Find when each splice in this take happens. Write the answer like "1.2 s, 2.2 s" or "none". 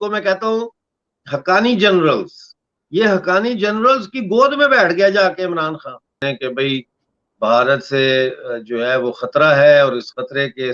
6.2 s